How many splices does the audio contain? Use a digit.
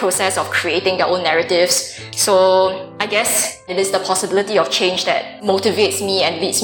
3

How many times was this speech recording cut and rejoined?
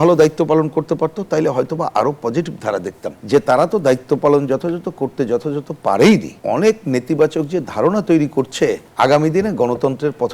3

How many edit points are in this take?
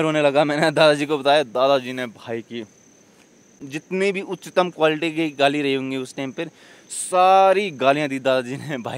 1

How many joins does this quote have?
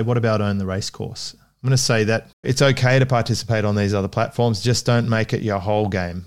1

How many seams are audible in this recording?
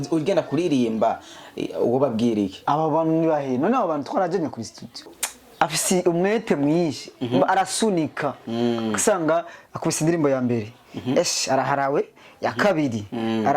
1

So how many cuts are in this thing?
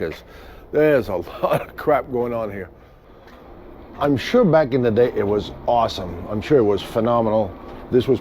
1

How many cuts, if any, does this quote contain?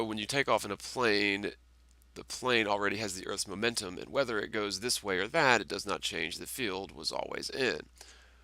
1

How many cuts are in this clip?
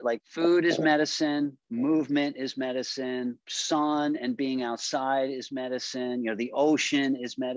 0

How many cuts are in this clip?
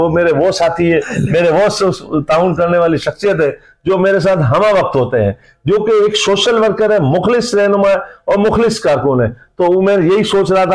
0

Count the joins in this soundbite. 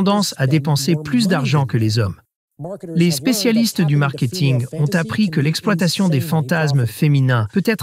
1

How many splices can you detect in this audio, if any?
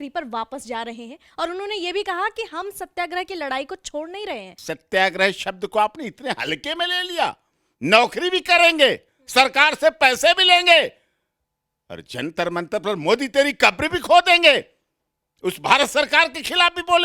1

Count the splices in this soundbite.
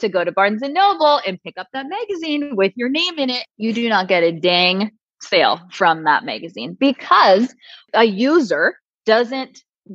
1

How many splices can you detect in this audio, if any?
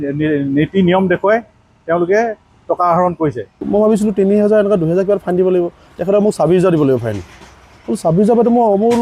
1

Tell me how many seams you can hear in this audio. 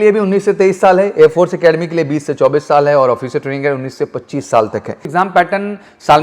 1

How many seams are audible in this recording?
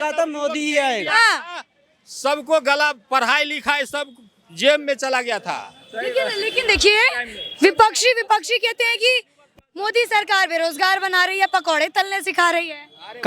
0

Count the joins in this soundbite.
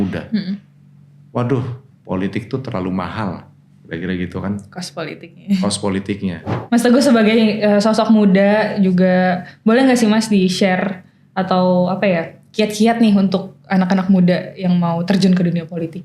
1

